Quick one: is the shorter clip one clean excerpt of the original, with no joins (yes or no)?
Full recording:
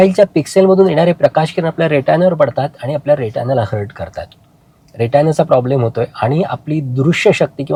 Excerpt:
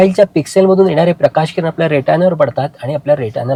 yes